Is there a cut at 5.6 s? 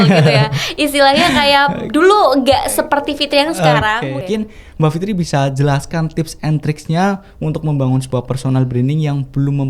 no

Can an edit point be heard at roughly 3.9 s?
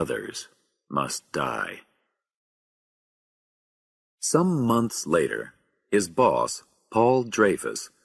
no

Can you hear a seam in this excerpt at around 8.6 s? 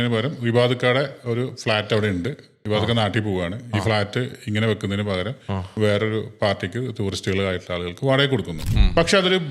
yes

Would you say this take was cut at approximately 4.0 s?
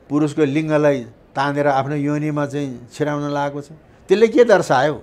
no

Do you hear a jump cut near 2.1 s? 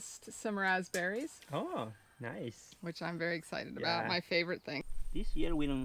no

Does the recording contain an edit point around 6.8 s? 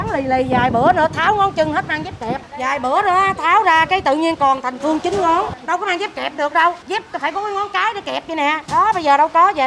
yes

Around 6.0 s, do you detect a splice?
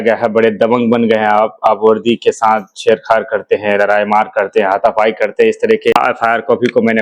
yes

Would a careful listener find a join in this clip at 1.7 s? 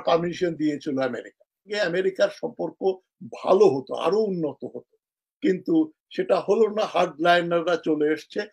yes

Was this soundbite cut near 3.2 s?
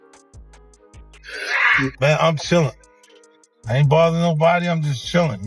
no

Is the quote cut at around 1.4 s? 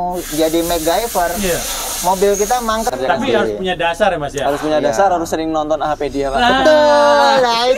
no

